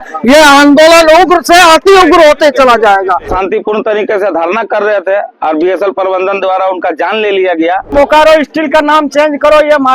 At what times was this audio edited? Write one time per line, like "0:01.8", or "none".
0:03.3
0:07.9